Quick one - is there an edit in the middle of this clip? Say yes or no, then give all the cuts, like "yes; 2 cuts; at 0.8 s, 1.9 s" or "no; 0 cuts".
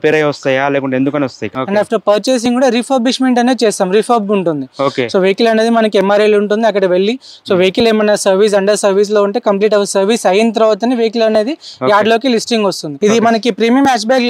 yes; 2 cuts; at 1.5 s, 12.9 s